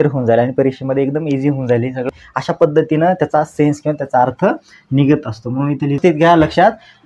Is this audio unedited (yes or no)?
no